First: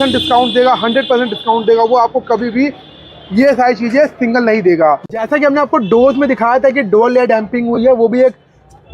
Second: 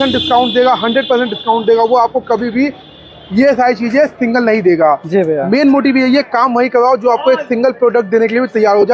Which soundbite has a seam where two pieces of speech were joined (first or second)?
first